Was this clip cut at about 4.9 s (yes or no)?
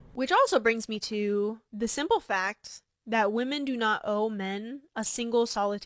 no